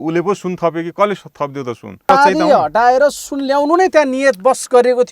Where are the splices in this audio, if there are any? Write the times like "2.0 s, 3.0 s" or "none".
2.1 s

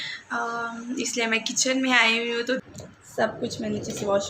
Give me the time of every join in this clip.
2.6 s

